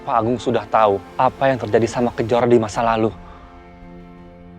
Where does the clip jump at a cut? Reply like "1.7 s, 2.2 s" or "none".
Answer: 1.1 s, 3.9 s